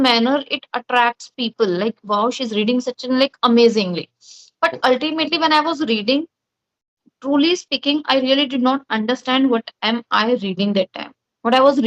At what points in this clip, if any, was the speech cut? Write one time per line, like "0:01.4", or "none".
none